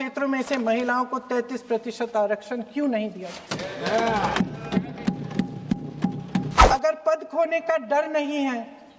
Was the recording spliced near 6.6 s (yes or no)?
yes